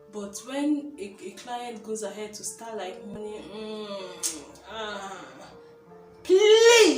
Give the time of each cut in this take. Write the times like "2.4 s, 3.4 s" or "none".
3.1 s